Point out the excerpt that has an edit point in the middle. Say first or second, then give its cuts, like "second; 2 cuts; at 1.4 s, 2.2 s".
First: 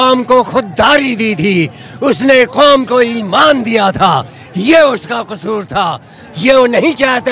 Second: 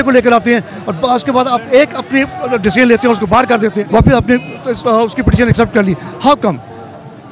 second; 1 cut; at 3.8 s